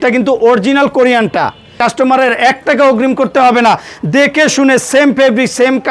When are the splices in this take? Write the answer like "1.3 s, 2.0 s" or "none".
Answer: 1.8 s